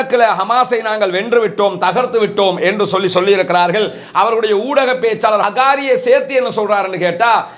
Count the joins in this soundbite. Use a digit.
1